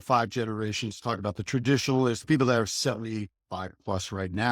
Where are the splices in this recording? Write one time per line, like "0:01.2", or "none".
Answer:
0:02.2